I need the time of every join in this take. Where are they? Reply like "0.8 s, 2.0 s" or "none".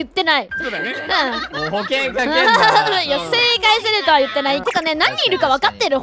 none